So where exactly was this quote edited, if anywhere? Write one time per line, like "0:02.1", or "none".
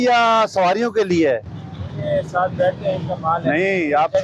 none